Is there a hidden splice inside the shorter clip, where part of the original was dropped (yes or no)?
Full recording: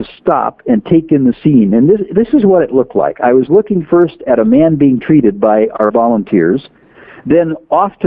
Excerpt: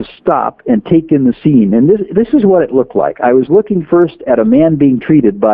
no